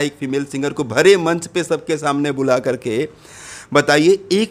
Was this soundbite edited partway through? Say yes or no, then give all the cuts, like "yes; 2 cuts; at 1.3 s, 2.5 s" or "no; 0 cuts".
no; 0 cuts